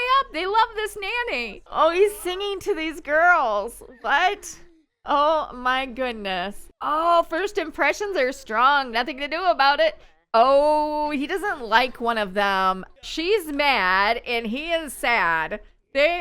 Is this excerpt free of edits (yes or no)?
no